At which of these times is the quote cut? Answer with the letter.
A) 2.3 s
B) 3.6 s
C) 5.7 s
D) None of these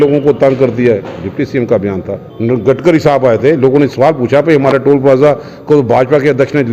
A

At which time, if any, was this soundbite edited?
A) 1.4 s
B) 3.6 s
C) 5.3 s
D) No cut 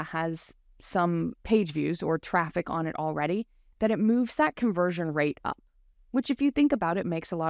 A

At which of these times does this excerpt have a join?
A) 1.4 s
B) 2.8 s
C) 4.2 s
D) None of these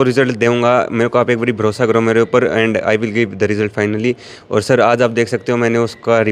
D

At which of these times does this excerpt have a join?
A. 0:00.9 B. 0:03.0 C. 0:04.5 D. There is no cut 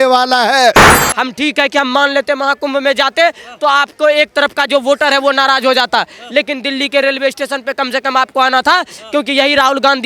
A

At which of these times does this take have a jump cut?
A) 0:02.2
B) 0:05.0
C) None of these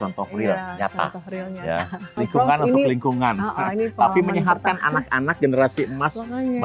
A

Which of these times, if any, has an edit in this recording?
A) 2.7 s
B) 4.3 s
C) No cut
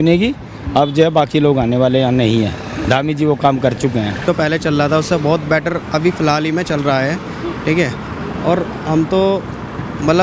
B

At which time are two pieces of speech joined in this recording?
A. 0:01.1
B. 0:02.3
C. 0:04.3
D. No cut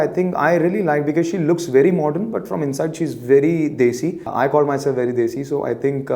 C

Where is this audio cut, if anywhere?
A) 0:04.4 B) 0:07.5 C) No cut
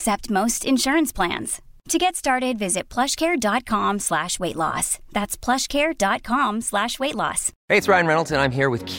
B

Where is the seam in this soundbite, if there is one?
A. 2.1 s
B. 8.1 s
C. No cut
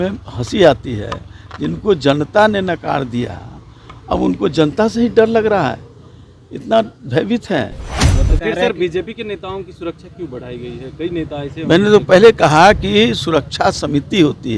B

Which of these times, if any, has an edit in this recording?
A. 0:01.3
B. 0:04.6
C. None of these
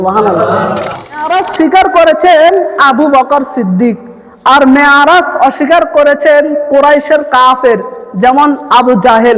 A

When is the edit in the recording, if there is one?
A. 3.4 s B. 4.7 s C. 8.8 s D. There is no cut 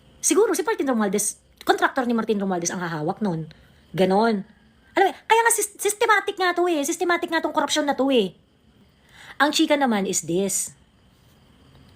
C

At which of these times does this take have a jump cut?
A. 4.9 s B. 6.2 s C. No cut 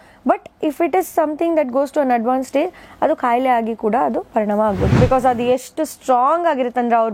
A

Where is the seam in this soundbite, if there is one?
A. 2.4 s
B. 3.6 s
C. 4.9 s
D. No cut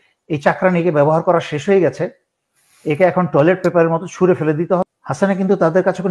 C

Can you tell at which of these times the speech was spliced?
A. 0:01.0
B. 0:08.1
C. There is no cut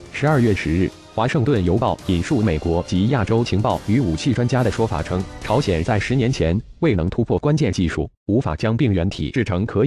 B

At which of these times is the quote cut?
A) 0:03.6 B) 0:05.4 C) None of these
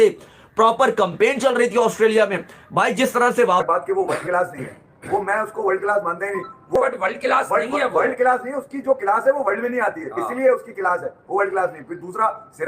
A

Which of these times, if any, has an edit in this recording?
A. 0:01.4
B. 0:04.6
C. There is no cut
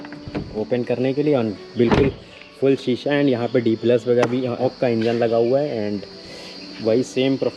B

